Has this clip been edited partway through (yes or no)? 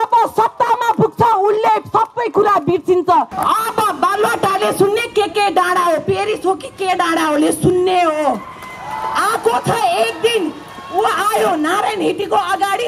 yes